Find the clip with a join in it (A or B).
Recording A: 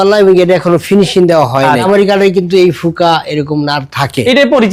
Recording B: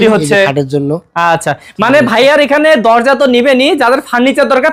A